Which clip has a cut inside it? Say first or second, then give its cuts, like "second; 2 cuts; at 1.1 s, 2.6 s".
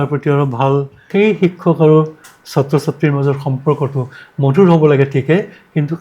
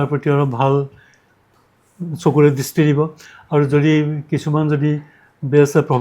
first; 1 cut; at 1.1 s